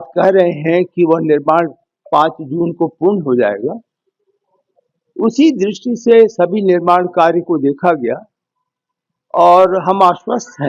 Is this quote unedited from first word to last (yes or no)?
yes